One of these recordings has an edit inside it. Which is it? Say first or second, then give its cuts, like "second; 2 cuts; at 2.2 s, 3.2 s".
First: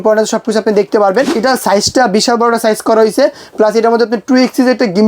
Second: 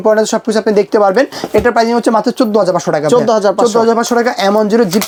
first; 1 cut; at 1.3 s